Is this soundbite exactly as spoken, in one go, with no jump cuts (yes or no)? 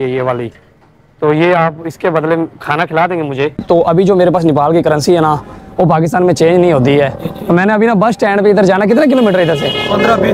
no